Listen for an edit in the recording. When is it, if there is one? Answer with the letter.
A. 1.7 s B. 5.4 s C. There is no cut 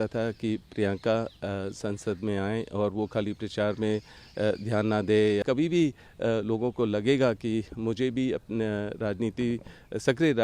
B